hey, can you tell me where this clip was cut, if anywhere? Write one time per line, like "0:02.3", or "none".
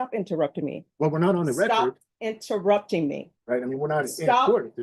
0:03.3